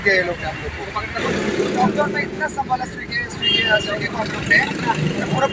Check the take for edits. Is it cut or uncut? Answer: cut